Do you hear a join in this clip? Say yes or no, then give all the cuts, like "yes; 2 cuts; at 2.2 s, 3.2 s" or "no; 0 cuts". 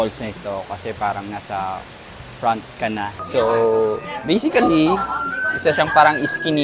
yes; 1 cut; at 3.2 s